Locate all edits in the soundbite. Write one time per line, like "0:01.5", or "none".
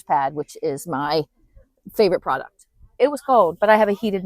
0:03.0